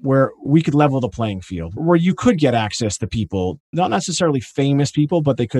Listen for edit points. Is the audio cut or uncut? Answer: uncut